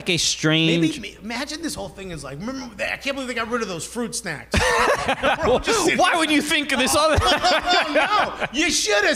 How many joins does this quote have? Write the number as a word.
zero